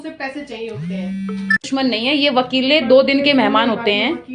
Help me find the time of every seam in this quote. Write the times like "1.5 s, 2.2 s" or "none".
2.0 s